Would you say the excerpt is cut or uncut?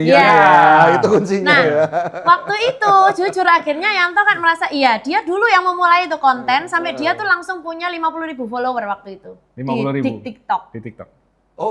uncut